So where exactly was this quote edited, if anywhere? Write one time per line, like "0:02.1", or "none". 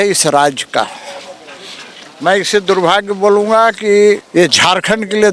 0:04.2